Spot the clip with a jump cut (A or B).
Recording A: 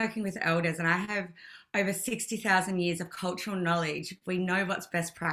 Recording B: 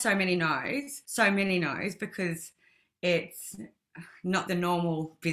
B